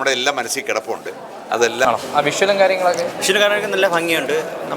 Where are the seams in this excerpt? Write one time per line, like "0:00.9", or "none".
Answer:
0:01.9

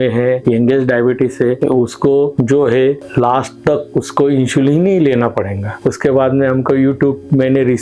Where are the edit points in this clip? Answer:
0:05.7

